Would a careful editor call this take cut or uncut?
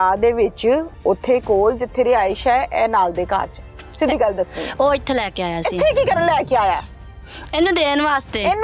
uncut